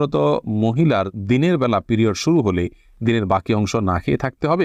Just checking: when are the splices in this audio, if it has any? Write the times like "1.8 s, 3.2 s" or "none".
none

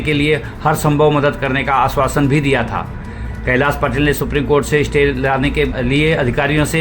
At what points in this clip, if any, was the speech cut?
5.8 s

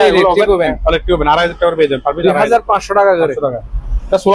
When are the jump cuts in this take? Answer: none

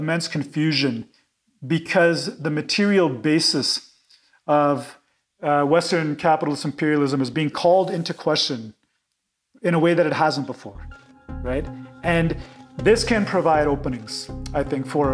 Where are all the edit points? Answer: none

